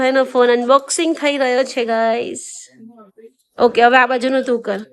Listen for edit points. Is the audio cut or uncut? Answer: uncut